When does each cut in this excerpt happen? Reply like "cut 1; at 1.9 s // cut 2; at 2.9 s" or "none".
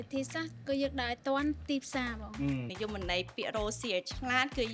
cut 1; at 2.7 s